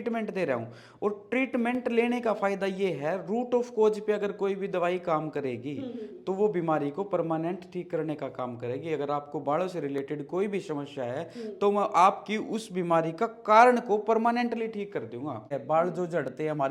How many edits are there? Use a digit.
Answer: 1